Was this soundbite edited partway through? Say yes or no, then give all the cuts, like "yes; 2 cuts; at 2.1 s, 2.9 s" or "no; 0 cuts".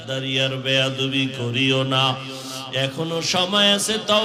no; 0 cuts